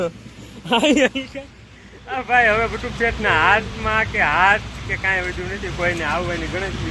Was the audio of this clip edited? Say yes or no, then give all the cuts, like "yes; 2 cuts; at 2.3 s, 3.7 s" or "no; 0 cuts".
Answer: no; 0 cuts